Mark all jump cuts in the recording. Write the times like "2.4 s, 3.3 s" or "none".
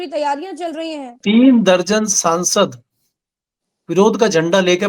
1.2 s